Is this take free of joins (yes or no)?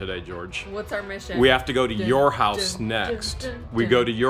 yes